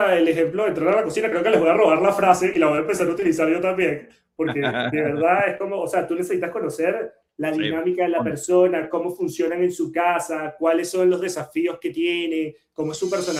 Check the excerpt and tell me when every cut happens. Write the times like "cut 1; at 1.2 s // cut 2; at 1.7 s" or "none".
none